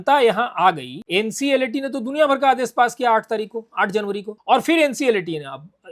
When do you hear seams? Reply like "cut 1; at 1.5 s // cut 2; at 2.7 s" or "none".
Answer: cut 1; at 0.9 s // cut 2; at 4.3 s

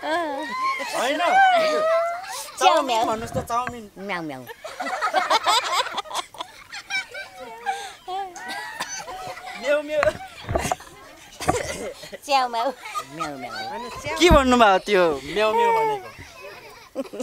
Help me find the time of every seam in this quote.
none

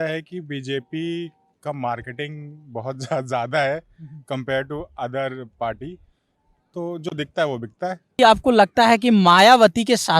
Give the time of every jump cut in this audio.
cut 1; at 8.2 s

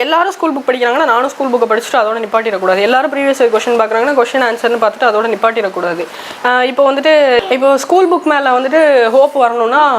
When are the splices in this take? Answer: cut 1; at 7.4 s

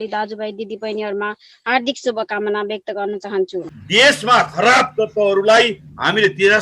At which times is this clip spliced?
cut 1; at 3.6 s

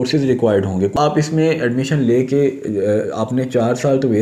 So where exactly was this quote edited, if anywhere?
cut 1; at 0.9 s

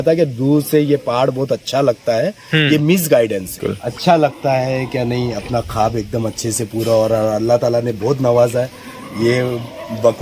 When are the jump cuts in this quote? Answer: cut 1; at 3.8 s

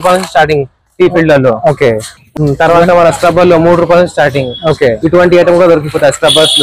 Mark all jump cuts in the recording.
none

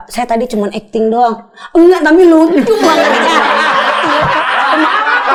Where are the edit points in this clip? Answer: none

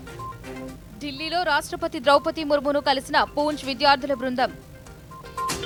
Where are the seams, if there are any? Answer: none

